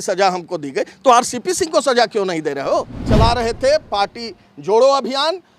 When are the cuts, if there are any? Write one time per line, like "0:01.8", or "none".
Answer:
0:03.0